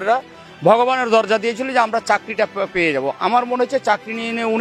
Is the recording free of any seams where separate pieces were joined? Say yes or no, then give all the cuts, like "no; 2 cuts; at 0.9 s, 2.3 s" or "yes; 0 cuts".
yes; 0 cuts